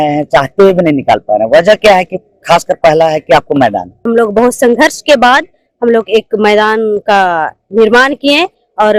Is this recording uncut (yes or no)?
no